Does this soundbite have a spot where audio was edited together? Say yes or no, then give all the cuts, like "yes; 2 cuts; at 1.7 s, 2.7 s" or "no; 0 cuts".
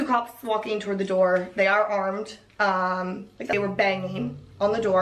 yes; 1 cut; at 3.5 s